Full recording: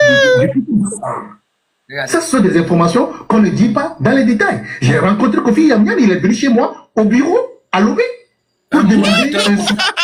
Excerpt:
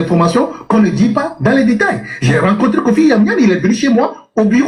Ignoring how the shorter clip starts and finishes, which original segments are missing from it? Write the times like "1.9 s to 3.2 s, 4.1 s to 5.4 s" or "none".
none